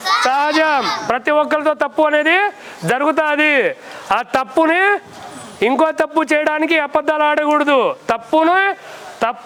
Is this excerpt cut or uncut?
uncut